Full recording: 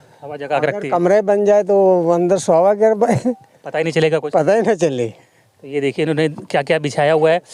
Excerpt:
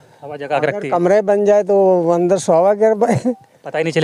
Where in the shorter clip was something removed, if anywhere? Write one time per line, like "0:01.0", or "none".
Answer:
none

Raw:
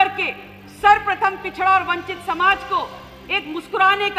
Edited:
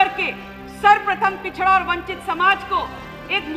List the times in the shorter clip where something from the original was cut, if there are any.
none

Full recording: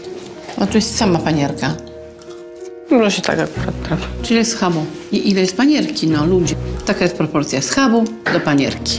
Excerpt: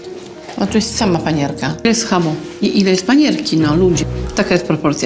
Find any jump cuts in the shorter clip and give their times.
0:01.8

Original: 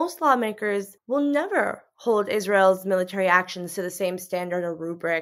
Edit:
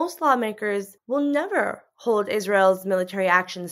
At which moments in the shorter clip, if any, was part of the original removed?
none

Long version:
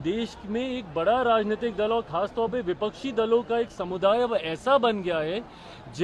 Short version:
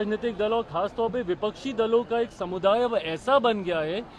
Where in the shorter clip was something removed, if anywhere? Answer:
none

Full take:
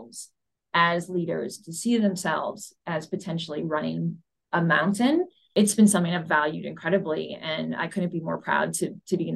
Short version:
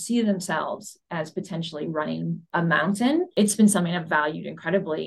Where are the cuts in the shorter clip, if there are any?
0:02.4
0:03.3

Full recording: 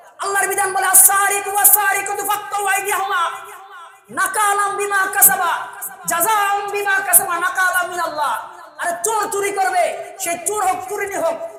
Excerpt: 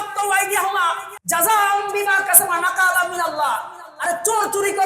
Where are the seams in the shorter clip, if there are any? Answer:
0:01.1

